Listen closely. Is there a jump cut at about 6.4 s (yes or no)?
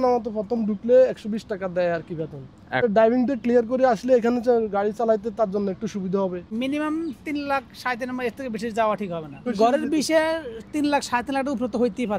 yes